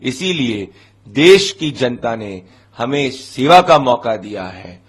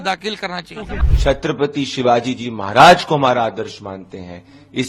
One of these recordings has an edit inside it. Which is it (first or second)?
second